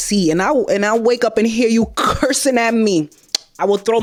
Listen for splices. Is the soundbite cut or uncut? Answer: uncut